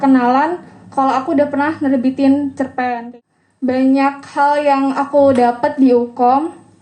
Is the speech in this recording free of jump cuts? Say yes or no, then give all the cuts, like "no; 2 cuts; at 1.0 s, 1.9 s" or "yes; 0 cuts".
no; 1 cut; at 3.2 s